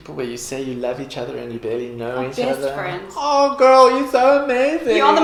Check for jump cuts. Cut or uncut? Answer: uncut